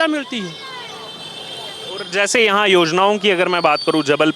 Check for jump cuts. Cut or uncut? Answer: uncut